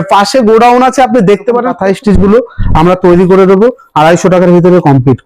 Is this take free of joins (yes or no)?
no